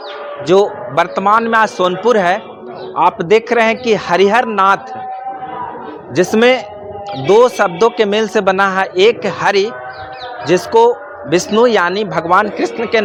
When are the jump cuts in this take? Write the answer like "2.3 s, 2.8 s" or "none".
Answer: none